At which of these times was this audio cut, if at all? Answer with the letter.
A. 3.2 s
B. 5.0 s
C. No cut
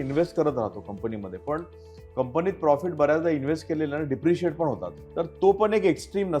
B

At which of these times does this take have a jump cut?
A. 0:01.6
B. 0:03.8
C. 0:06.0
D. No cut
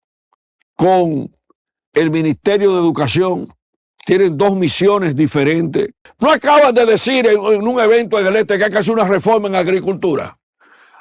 C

